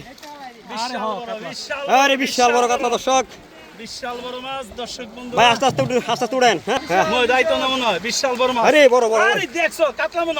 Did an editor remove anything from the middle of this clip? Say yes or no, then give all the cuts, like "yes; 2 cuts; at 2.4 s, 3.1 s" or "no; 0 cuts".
yes; 1 cut; at 6.8 s